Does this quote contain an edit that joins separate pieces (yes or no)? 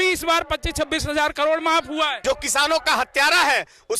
yes